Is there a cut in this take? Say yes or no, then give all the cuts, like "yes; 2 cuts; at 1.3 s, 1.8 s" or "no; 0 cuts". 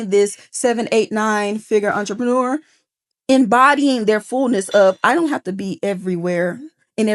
no; 0 cuts